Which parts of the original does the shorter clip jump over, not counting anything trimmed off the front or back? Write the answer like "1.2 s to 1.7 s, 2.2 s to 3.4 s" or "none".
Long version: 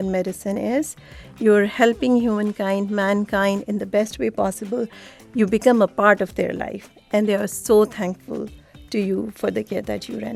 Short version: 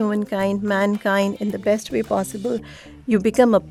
none